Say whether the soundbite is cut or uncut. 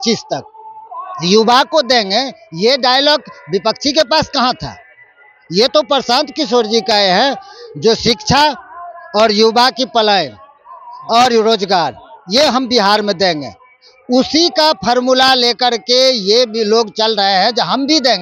uncut